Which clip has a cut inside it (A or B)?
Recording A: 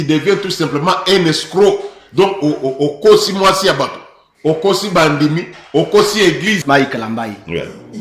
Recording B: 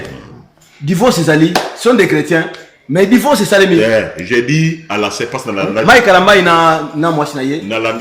A